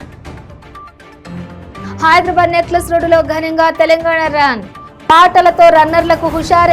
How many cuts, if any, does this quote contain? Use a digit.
1